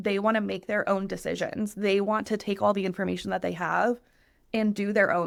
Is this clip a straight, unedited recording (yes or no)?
yes